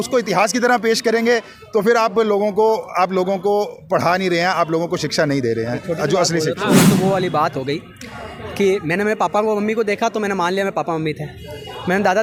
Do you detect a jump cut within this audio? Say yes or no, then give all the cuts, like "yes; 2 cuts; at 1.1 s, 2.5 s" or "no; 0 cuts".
no; 0 cuts